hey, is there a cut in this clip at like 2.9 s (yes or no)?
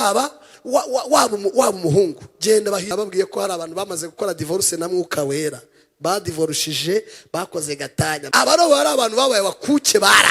yes